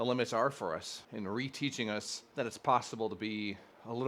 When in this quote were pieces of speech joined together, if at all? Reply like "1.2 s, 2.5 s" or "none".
1.0 s, 2.2 s